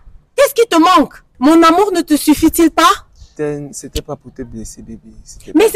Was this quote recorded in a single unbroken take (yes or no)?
no